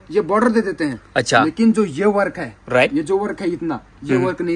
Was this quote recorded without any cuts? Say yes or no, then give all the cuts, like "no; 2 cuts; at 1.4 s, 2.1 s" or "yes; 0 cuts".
yes; 0 cuts